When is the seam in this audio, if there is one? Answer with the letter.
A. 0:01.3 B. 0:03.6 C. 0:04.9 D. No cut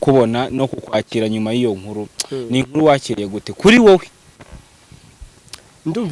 D